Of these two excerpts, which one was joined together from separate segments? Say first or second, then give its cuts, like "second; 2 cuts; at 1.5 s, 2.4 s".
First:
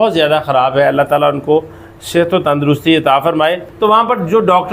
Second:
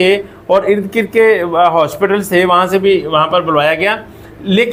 first; 1 cut; at 3.7 s